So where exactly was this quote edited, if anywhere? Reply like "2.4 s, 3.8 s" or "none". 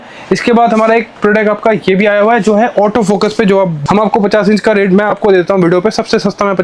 3.8 s